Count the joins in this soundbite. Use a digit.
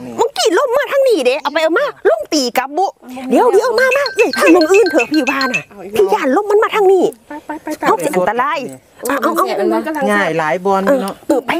1